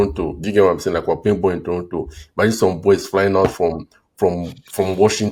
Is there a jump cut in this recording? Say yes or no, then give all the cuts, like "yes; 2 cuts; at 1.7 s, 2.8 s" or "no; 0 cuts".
no; 0 cuts